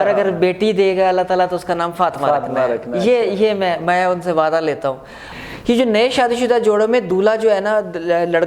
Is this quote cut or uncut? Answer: cut